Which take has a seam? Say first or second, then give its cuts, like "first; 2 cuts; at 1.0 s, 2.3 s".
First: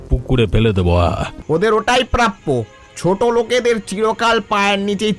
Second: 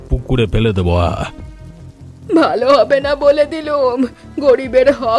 first; 1 cut; at 1.3 s